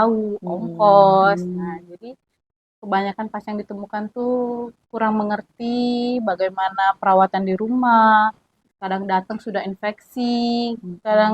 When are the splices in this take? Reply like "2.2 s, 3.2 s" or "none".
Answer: none